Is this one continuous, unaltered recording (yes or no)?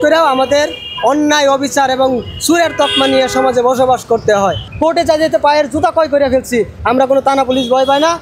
no